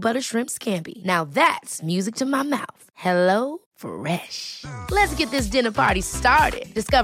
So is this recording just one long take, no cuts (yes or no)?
yes